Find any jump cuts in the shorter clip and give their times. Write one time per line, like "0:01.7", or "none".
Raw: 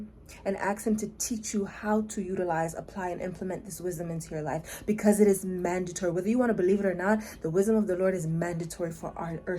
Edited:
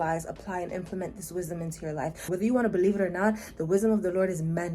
0:02.3